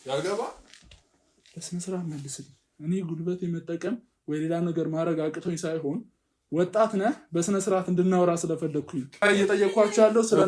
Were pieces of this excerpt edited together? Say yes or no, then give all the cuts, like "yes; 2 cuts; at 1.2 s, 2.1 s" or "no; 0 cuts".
yes; 1 cut; at 9.1 s